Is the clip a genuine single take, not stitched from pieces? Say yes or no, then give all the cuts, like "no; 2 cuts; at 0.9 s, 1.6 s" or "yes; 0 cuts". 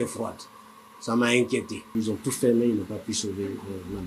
no; 1 cut; at 1.8 s